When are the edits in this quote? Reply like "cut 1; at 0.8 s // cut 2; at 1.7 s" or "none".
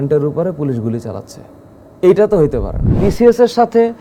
cut 1; at 2.9 s